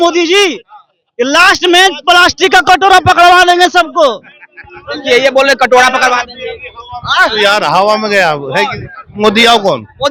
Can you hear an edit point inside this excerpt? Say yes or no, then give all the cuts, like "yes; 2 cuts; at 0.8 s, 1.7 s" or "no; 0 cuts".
no; 0 cuts